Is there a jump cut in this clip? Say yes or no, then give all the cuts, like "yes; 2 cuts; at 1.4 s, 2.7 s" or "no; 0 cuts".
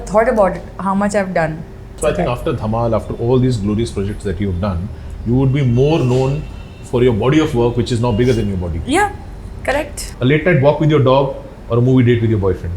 yes; 2 cuts; at 1.8 s, 10.0 s